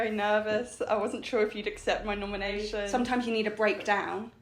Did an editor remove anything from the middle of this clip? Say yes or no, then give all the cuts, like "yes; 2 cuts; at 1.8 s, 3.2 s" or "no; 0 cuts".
yes; 1 cut; at 2.9 s